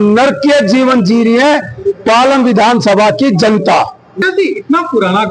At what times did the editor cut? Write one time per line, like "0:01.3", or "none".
0:04.0